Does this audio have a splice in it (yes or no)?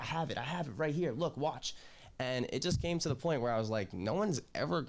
no